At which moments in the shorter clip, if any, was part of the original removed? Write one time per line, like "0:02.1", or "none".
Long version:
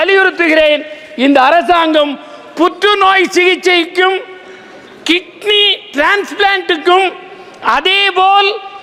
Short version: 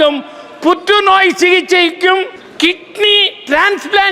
0:02.4